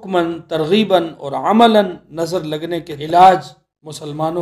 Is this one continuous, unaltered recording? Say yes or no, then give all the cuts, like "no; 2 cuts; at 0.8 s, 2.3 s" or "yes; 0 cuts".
no; 1 cut; at 2.9 s